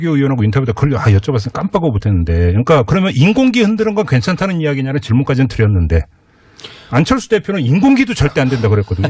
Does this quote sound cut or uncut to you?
cut